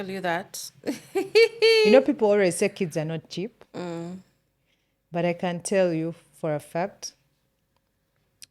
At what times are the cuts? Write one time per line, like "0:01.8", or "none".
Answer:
none